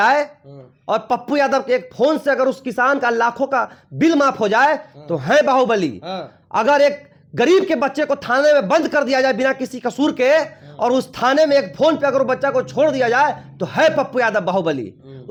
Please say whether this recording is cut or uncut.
uncut